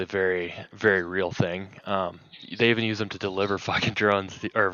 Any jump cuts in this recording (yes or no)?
no